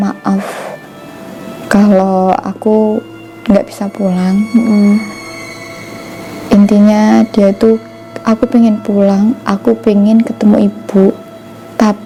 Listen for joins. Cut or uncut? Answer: uncut